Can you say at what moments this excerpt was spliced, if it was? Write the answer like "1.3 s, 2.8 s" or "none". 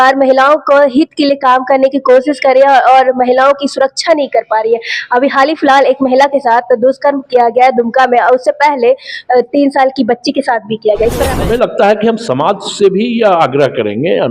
11.3 s

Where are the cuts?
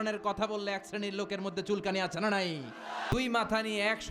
3.1 s

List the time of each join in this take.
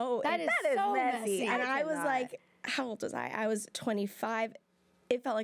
none

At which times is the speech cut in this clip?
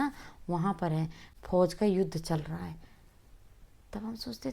none

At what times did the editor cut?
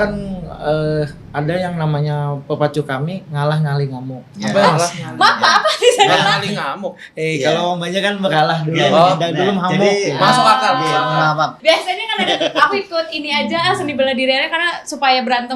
11.6 s

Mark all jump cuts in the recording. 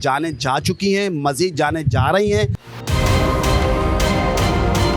2.6 s

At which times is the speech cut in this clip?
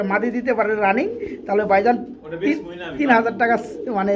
none

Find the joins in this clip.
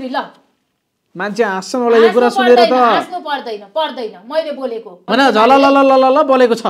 5.0 s

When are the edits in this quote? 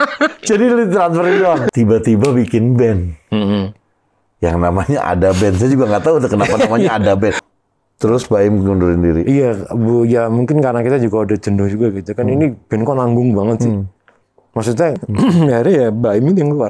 1.7 s, 7.4 s, 15.0 s

